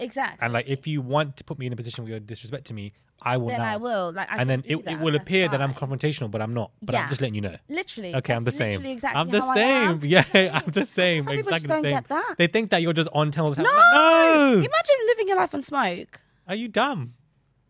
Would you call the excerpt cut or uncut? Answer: uncut